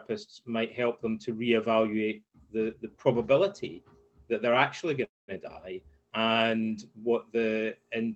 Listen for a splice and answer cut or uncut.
uncut